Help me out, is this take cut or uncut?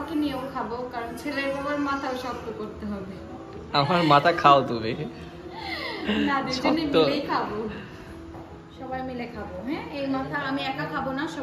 uncut